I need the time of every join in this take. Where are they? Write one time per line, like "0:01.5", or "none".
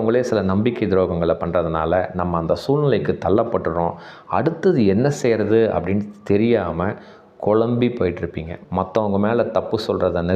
0:08.5